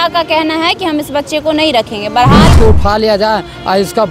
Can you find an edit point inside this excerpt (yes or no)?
yes